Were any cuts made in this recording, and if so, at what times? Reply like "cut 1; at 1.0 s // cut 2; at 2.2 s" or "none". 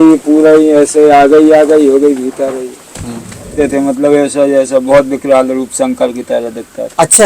cut 1; at 3.6 s